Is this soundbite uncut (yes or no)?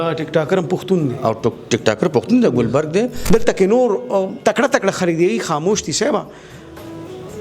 no